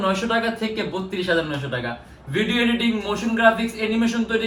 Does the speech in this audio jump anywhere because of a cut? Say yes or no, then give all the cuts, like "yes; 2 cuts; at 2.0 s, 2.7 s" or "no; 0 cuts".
no; 0 cuts